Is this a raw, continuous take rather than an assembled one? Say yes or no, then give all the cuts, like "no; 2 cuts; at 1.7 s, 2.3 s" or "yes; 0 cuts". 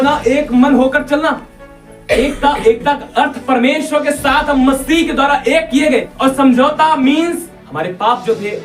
no; 2 cuts; at 6.1 s, 7.6 s